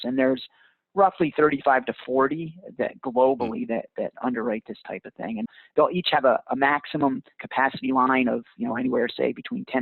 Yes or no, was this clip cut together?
yes